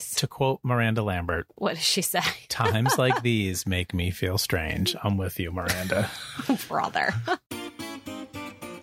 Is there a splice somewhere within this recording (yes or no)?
yes